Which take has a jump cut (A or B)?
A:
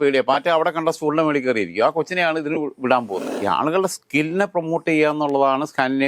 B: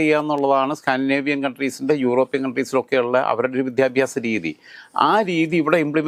A